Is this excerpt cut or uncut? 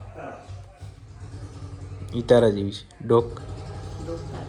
uncut